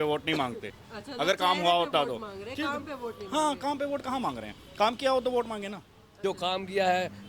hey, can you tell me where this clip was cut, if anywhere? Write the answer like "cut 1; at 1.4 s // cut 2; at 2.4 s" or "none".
cut 1; at 6.0 s